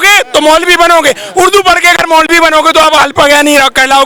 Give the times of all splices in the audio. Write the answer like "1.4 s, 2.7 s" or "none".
none